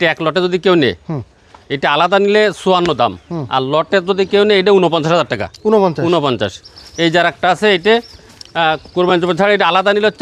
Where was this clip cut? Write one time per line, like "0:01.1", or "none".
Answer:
none